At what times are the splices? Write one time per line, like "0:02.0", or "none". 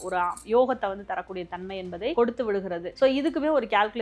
0:02.1
0:02.9